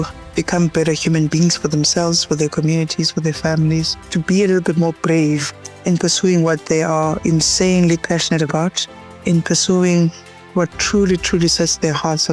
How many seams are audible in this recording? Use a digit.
2